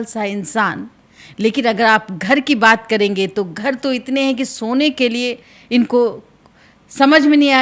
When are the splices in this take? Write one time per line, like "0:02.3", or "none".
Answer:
none